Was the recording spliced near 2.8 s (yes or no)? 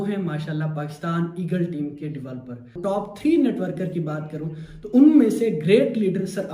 yes